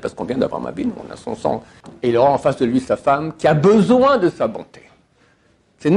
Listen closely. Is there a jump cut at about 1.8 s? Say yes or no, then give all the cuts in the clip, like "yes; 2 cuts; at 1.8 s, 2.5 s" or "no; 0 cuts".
yes; 1 cut; at 1.8 s